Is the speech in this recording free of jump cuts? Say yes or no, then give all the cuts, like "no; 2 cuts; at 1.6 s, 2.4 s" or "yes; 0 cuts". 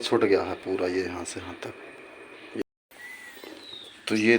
no; 1 cut; at 2.6 s